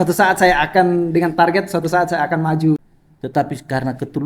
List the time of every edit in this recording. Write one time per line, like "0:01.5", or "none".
0:02.8